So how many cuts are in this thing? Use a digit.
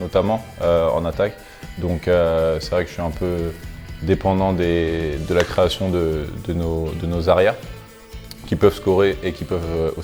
0